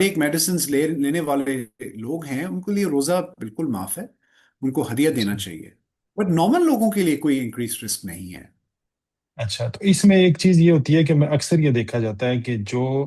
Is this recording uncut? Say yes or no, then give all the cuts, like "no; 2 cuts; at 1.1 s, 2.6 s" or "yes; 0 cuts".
yes; 0 cuts